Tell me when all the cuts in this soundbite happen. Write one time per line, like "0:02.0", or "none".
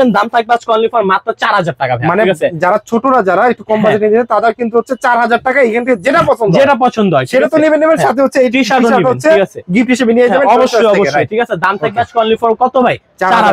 none

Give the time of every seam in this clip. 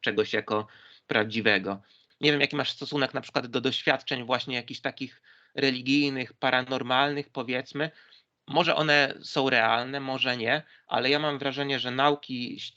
0:02.0

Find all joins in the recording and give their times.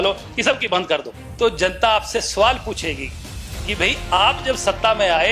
0:01.2

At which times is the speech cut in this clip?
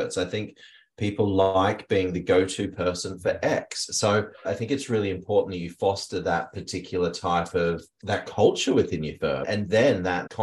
0:04.4
0:07.9
0:09.4

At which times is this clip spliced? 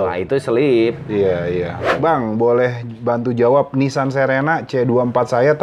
0:01.8

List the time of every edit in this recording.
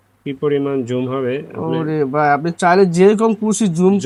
none

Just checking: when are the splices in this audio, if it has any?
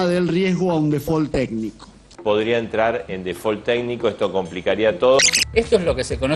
0:05.4

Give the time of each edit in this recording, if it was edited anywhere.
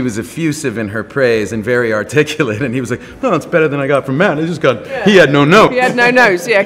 none

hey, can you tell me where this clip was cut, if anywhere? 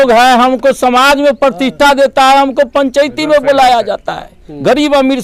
none

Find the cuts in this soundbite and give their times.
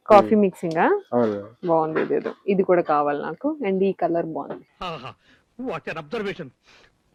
none

